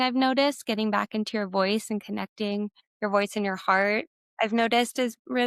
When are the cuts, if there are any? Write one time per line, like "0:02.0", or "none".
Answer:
0:02.8
0:04.2